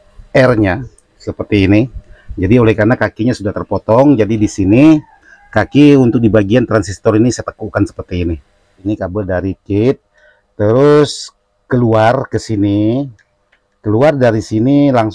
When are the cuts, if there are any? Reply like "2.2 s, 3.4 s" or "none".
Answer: 8.8 s